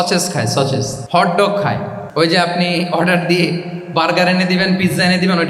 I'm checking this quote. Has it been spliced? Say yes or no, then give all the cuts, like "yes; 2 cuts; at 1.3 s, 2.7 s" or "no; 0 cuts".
yes; 2 cuts; at 1.0 s, 2.0 s